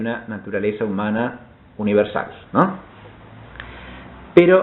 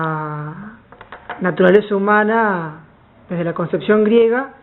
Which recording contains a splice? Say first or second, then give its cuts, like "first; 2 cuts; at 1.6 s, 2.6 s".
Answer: first; 1 cut; at 1.0 s